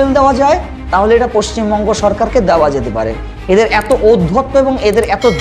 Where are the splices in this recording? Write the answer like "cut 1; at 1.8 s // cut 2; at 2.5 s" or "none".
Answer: none